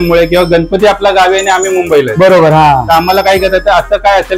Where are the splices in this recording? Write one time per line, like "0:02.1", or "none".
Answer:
none